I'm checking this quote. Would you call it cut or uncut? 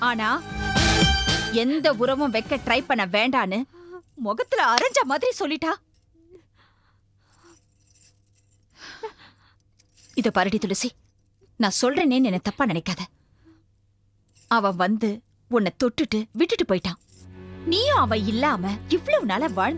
uncut